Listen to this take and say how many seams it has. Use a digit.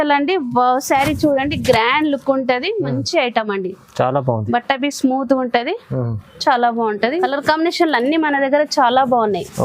1